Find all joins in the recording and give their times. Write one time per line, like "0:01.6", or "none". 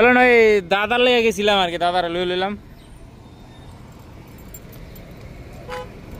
none

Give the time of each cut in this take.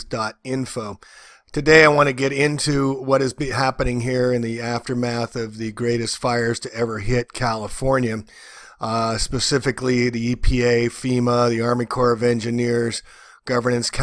none

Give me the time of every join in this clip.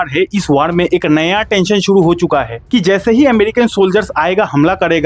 0:02.6

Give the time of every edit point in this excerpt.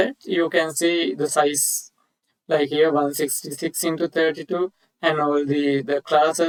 none

